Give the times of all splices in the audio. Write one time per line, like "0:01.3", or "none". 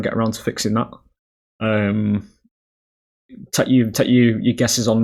none